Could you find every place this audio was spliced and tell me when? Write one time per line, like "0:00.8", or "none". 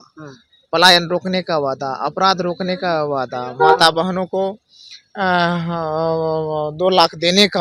none